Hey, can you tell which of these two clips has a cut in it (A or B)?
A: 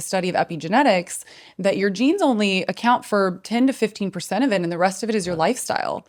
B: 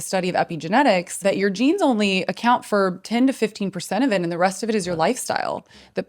B